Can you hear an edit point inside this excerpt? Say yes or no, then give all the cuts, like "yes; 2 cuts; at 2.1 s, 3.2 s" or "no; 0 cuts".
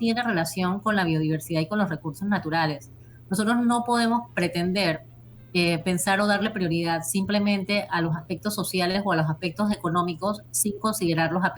no; 0 cuts